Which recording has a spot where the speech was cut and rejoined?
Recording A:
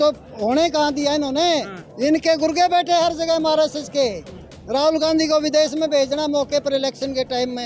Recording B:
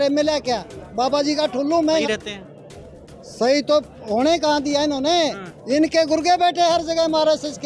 B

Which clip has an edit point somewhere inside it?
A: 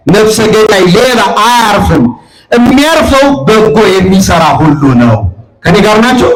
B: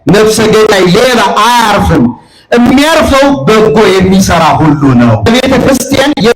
B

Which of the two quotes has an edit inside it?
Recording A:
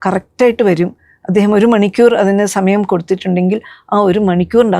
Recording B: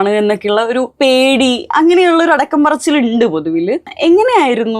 B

